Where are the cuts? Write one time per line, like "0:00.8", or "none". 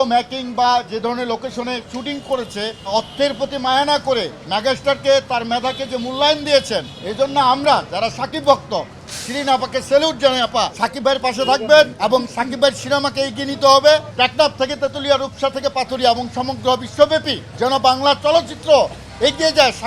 0:02.8
0:07.0
0:10.8
0:11.9
0:14.1
0:17.4